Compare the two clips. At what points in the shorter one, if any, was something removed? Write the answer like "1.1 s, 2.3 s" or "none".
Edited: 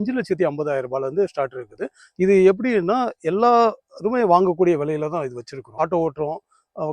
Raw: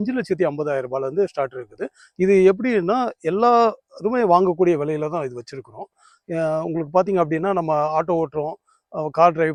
5.8 s